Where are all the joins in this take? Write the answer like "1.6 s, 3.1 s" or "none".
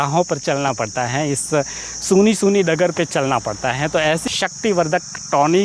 4.2 s